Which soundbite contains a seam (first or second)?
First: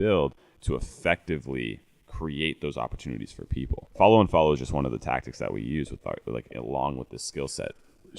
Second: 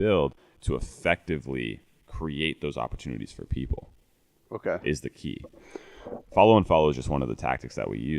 first